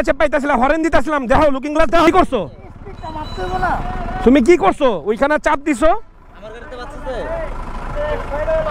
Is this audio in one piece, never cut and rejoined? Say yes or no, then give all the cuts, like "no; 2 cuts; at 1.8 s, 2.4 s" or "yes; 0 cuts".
no; 1 cut; at 2.1 s